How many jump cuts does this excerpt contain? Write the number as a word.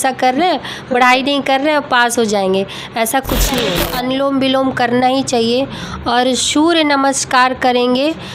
one